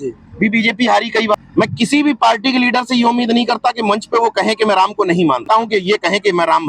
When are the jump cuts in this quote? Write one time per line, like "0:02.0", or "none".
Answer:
0:01.3
0:05.4